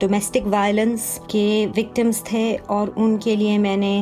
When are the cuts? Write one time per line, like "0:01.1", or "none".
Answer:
0:01.1